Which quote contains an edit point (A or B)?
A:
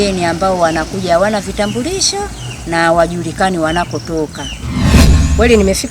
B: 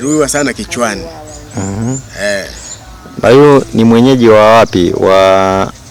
A